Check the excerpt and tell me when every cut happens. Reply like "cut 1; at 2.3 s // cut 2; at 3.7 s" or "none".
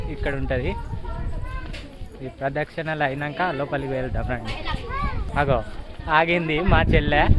cut 1; at 5.3 s